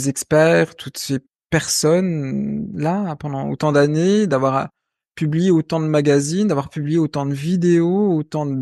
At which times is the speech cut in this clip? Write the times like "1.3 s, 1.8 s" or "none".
none